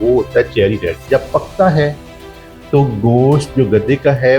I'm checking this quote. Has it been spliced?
yes; 1 cut; at 1.1 s

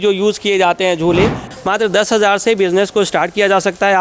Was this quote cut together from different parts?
yes; 1 cut; at 1.4 s

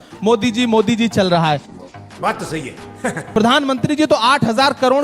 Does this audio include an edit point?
yes; 2 cuts; at 1.8 s, 3.2 s

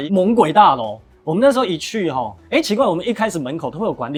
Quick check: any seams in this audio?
no; 0 cuts

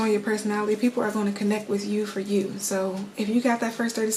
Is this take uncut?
yes; 0 cuts

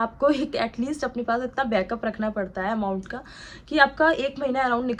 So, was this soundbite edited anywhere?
no; 0 cuts

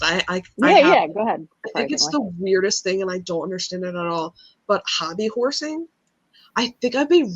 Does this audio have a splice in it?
yes; 1 cut; at 1.5 s

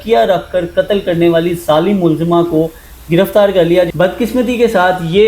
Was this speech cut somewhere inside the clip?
yes; 1 cut; at 3.9 s

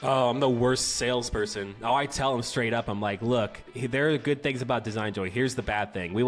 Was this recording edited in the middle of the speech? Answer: yes; 1 cut; at 3.6 s

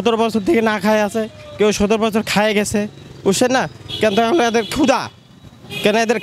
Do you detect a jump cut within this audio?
no; 0 cuts

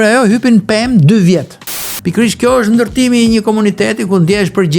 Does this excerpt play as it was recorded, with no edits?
no; 1 cut; at 1.8 s

